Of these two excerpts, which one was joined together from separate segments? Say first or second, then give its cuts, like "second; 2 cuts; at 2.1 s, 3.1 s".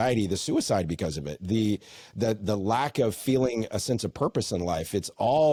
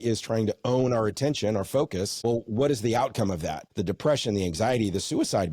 second; 2 cuts; at 2.1 s, 3.6 s